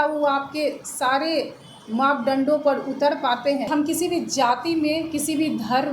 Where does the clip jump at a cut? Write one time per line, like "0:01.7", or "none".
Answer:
0:03.7